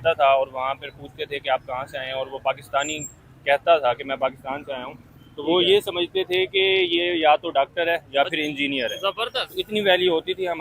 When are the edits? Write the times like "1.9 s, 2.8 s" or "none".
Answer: none